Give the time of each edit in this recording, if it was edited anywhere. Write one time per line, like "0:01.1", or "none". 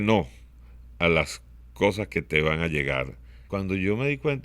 0:03.4